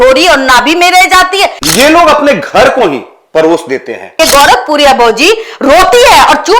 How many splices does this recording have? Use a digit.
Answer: 2